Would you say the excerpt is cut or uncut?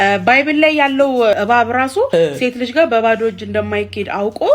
cut